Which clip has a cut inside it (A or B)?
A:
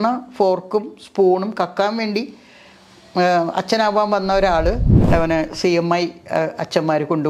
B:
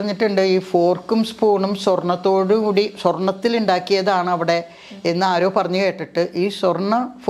A